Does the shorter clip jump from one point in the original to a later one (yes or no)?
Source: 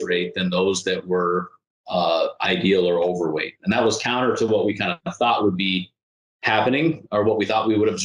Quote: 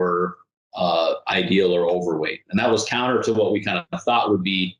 no